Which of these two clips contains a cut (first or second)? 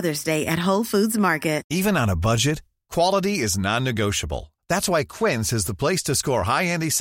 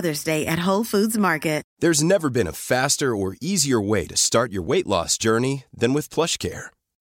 second